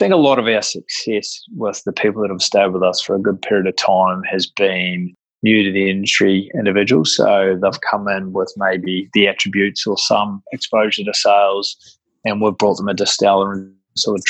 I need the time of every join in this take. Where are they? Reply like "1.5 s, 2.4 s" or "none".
none